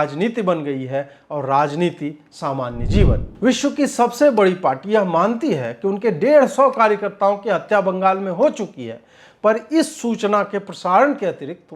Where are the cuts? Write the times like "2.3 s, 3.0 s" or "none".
3.2 s